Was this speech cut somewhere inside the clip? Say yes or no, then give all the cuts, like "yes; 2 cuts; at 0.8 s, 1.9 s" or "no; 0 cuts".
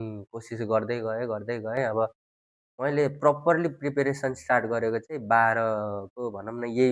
no; 0 cuts